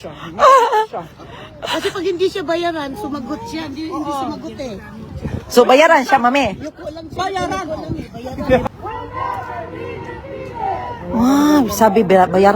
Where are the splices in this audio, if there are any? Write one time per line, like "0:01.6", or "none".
0:08.7